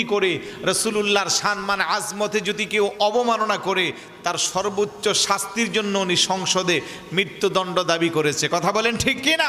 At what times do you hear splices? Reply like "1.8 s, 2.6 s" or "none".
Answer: none